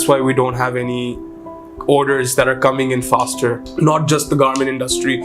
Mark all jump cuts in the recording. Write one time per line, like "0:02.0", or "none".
0:03.7